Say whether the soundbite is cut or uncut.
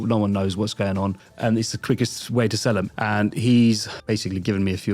cut